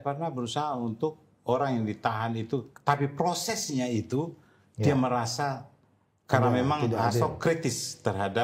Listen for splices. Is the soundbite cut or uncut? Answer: uncut